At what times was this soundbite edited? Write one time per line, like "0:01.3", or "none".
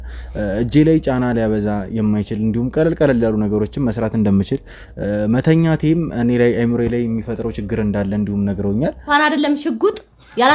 0:09.1